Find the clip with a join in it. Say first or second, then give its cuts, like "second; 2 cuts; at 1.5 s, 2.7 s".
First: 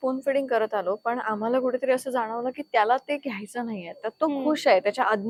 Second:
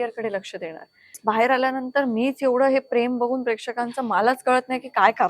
second; 1 cut; at 1.2 s